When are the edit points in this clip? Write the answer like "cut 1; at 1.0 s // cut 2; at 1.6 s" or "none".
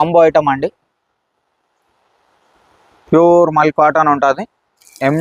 none

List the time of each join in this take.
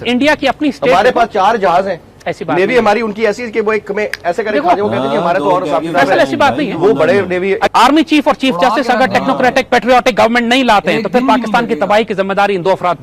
cut 1; at 7.7 s

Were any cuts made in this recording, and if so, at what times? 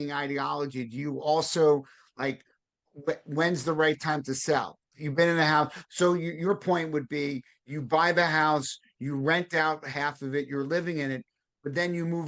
none

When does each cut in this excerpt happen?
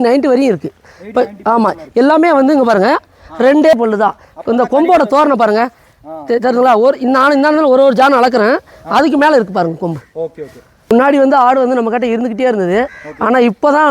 cut 1; at 3.7 s // cut 2; at 10.9 s

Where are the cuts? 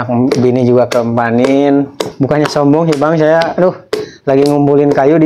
cut 1; at 2.0 s

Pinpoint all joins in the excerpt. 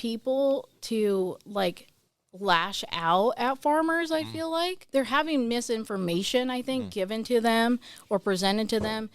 cut 1; at 4.8 s

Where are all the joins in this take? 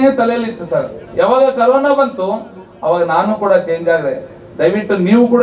none

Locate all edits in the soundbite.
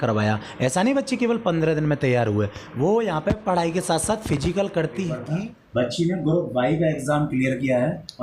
cut 1; at 5.3 s

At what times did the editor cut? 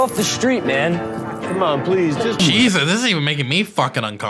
cut 1; at 2.4 s

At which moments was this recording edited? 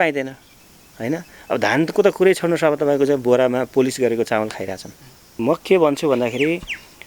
cut 1; at 5.4 s

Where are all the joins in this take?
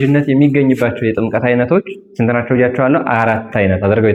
none

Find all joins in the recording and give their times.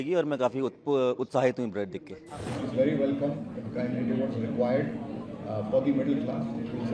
cut 1; at 2.3 s

